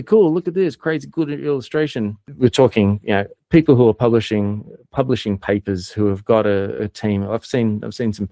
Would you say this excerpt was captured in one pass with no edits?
no; 1 cut; at 2.2 s

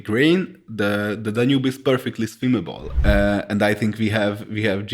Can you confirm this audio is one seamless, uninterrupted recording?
no; 1 cut; at 2.8 s

